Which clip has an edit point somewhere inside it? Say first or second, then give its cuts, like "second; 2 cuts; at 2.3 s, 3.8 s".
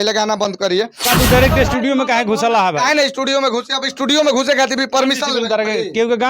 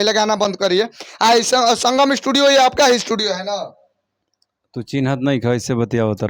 first; 1 cut; at 1.0 s